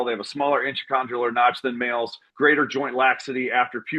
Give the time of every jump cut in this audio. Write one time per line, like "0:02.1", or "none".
0:02.3